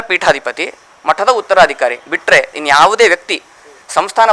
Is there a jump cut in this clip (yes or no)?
yes